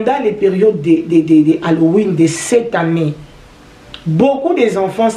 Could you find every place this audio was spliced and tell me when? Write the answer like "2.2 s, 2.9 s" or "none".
none